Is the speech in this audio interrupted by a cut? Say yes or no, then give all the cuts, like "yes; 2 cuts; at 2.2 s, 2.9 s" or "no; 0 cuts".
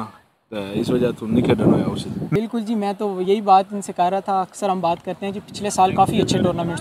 yes; 1 cut; at 2.2 s